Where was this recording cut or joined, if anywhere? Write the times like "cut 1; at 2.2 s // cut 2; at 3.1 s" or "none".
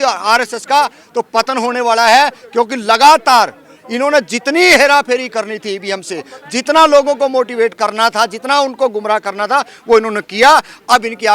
none